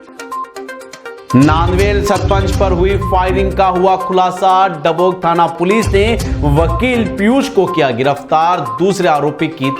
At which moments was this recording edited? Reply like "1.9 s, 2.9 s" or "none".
1.3 s